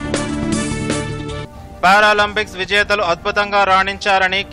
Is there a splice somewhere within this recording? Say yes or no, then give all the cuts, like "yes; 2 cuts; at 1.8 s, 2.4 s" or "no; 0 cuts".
yes; 1 cut; at 1.2 s